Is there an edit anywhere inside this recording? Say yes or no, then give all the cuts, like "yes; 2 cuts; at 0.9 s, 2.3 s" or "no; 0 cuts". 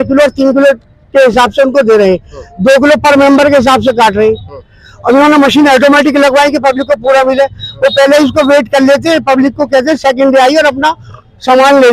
no; 0 cuts